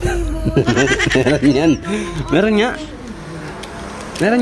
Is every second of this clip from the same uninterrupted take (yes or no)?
yes